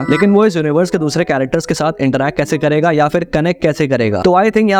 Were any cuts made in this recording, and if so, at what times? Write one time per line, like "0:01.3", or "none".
none